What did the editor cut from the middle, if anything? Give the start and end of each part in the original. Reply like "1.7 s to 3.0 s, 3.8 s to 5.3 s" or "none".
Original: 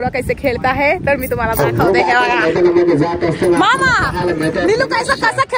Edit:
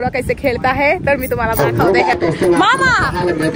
2.1 s to 3.1 s